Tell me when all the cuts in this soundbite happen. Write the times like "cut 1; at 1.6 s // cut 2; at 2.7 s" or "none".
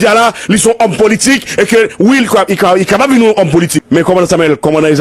cut 1; at 3.8 s